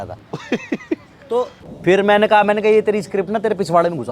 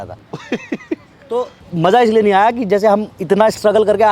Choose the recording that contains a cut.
first; 1 cut; at 1.6 s

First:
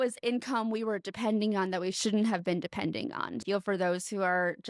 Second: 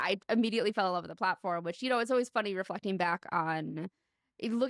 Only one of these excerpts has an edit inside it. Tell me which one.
first; 1 cut; at 3.3 s

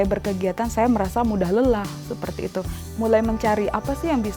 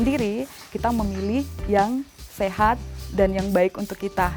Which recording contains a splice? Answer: first; 1 cut; at 2.8 s

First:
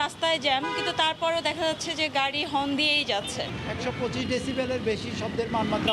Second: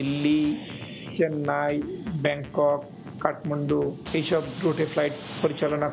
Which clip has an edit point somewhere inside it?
first; 1 cut; at 3.5 s

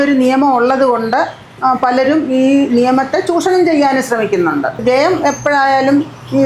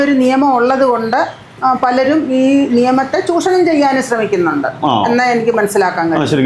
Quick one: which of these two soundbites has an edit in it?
first; 1 cut; at 4.8 s

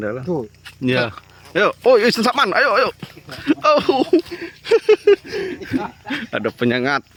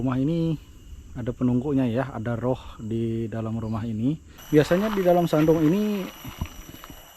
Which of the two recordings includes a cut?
second; 1 cut; at 4.3 s

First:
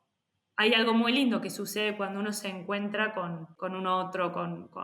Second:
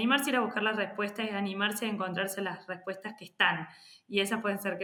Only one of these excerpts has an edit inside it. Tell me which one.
first; 1 cut; at 3.5 s

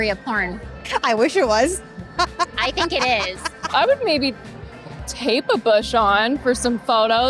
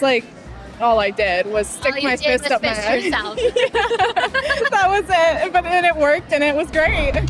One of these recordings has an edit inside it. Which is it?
first; 2 cuts; at 0.8 s, 3.6 s

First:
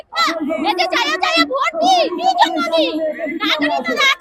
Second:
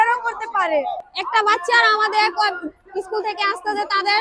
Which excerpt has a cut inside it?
second; 1 cut; at 1.1 s

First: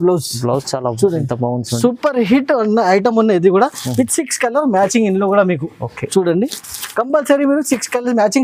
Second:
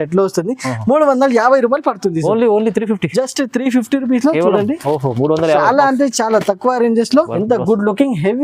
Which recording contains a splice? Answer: second; 1 cut; at 7.3 s

